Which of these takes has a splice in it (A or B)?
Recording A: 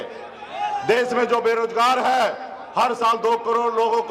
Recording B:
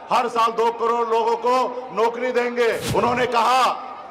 B